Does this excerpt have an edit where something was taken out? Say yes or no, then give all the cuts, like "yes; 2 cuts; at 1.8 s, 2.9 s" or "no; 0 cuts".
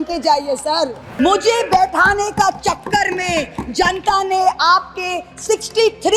yes; 1 cut; at 1.0 s